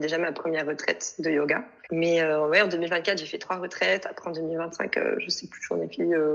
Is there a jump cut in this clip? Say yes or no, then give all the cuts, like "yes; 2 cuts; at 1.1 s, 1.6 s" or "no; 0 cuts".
yes; 1 cut; at 1.7 s